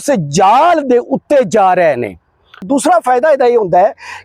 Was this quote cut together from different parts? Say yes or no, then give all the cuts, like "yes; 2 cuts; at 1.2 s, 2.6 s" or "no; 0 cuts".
yes; 1 cut; at 2.6 s